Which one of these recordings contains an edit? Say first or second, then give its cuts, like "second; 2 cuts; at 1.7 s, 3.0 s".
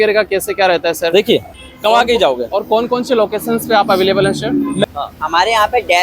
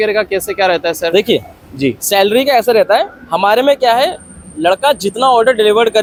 first; 2 cuts; at 1.6 s, 4.8 s